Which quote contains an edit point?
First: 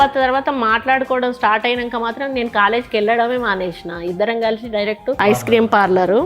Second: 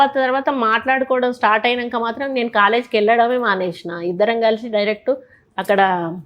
first; 1 cut; at 5.2 s

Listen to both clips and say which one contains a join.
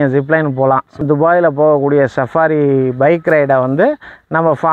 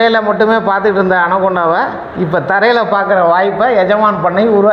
first; 1 cut; at 1.0 s

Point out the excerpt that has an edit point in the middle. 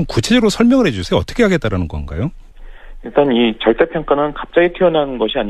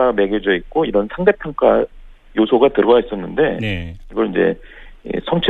first; 1 cut; at 1.9 s

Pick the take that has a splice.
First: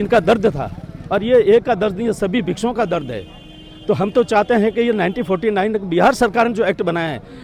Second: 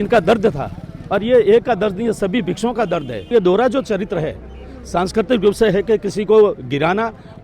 second; 1 cut; at 3.3 s

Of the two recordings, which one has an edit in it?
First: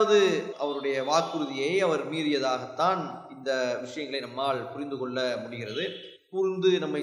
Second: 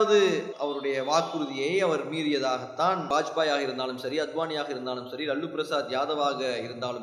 second; 1 cut; at 3.1 s

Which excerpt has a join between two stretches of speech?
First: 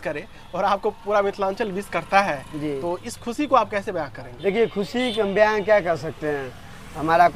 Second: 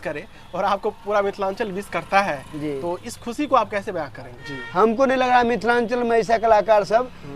second; 1 cut; at 4.3 s

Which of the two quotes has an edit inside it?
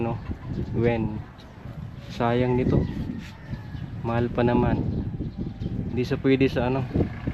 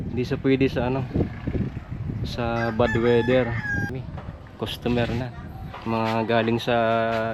second; 1 cut; at 4.1 s

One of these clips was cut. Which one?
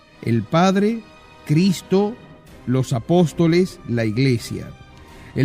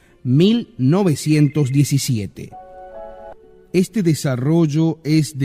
first; 1 cut; at 3.1 s

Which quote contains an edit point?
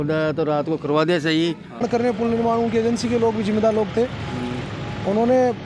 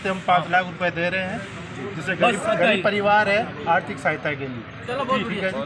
first; 1 cut; at 1.8 s

